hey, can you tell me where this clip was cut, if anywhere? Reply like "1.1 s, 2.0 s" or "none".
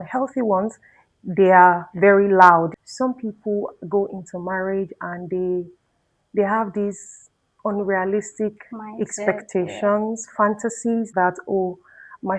2.8 s, 11.1 s